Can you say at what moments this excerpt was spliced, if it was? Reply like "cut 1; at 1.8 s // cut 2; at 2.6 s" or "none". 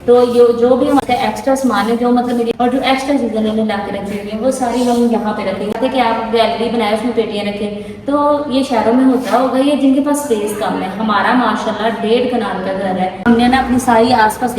cut 1; at 1.0 s // cut 2; at 2.5 s // cut 3; at 5.7 s // cut 4; at 13.3 s

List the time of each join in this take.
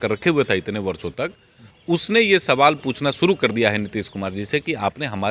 none

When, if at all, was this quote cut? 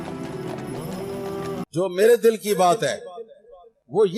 cut 1; at 1.6 s

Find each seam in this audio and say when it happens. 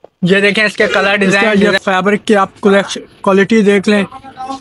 cut 1; at 1.4 s

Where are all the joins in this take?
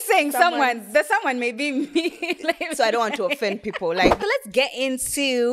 cut 1; at 4.2 s

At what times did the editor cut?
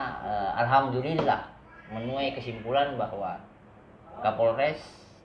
none

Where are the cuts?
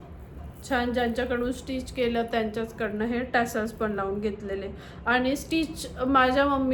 none

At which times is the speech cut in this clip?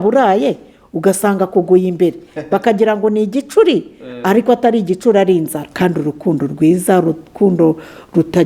cut 1; at 5.6 s

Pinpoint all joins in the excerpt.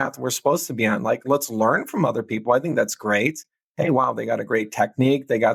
none

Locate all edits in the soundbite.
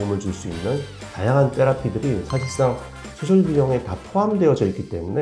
none

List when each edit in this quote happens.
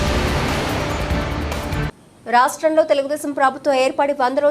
cut 1; at 1.9 s

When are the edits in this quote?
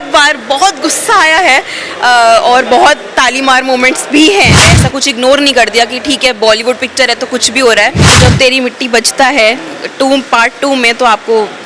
cut 1; at 4.7 s // cut 2; at 8.2 s

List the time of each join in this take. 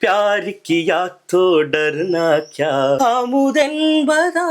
cut 1; at 3.0 s

